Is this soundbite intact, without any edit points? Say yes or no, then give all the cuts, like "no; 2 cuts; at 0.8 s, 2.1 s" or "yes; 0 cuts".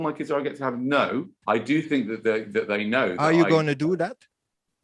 no; 1 cut; at 1.4 s